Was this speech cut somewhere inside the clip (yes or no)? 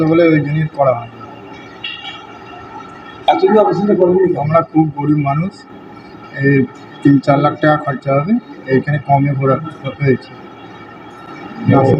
no